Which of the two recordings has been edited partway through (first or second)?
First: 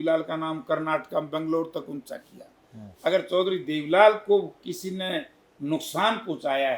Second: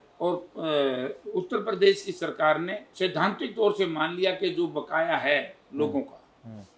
second